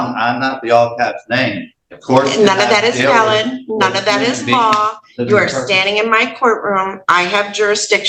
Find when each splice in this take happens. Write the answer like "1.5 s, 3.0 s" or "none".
none